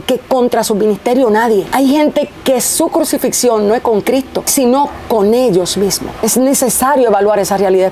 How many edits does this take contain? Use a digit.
3